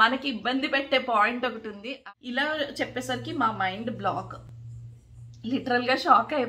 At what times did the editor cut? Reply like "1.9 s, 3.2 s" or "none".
1.9 s